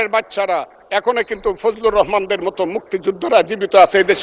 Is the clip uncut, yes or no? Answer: yes